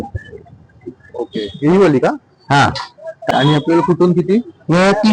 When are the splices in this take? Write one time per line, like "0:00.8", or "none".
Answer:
0:03.2